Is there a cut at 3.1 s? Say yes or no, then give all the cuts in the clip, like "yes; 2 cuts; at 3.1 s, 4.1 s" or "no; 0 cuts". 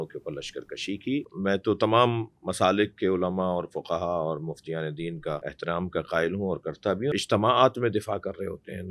no; 3 cuts; at 1.3 s, 5.5 s, 7.1 s